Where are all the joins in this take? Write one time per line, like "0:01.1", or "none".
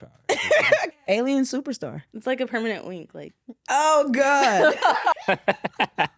0:01.0
0:05.1